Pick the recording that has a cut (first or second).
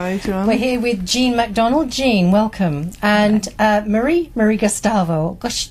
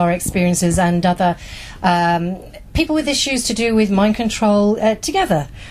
second